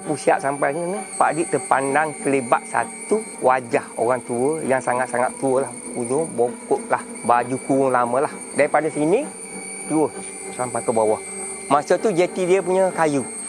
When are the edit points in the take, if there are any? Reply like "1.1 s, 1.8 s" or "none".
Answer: 1.0 s